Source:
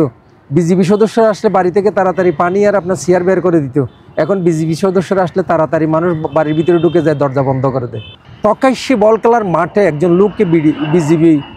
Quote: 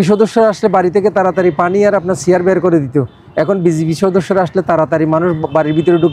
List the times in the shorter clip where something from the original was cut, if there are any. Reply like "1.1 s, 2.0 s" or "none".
none